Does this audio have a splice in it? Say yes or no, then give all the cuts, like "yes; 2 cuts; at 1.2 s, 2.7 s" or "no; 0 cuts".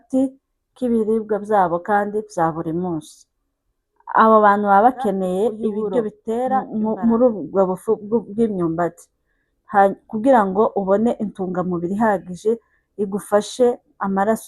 yes; 1 cut; at 6.7 s